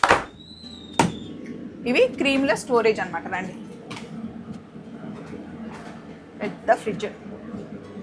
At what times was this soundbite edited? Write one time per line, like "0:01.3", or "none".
none